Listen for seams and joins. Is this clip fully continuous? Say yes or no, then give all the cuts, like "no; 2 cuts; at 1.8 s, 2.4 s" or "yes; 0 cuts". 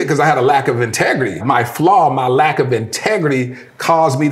no; 1 cut; at 1.4 s